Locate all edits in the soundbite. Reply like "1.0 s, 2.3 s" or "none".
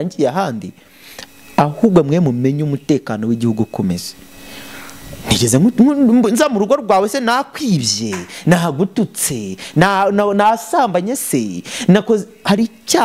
none